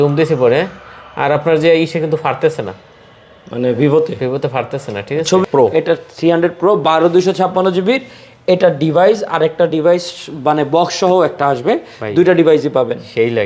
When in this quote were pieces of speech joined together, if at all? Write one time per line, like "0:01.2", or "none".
0:05.5